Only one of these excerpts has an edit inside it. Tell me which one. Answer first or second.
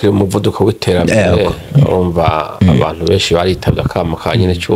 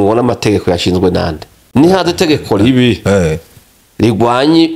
second